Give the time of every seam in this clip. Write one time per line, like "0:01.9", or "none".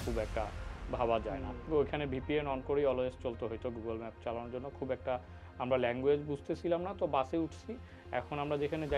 0:01.5